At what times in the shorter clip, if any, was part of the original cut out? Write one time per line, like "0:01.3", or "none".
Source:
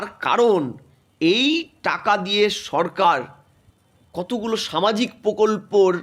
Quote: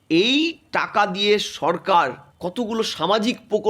0:02.3